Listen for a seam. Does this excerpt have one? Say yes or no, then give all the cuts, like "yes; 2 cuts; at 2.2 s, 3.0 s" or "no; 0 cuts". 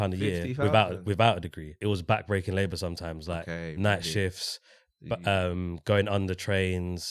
yes; 1 cut; at 1.7 s